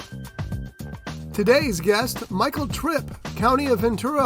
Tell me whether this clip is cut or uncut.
cut